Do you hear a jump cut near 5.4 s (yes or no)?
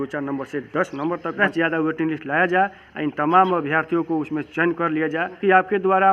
yes